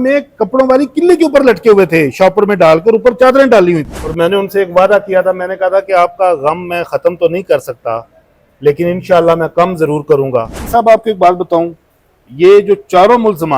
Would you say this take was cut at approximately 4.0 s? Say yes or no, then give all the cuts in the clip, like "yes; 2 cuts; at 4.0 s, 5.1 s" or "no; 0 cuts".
yes; 2 cuts; at 4.0 s, 10.6 s